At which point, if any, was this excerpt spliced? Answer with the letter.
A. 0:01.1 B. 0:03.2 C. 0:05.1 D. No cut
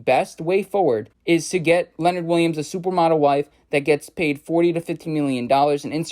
A